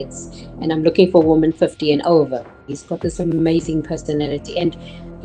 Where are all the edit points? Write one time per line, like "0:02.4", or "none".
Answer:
0:02.5